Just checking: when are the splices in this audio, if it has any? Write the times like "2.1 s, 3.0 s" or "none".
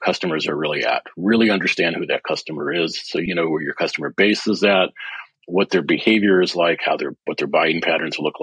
3.2 s

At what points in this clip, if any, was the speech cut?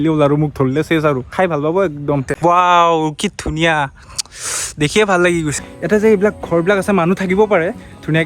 2.3 s, 5.6 s

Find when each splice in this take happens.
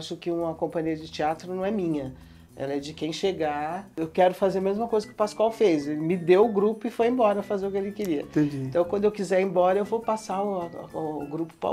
3.9 s

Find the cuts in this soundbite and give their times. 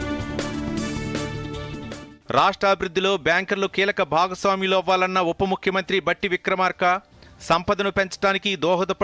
2.0 s

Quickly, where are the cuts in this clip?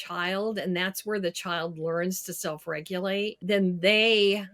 3.4 s

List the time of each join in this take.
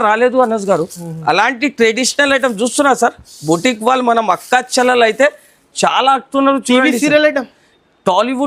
none

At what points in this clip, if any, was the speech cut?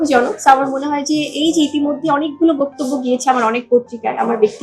none

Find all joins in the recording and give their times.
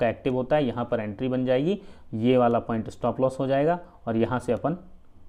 none

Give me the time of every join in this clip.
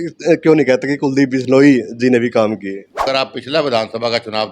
3.0 s

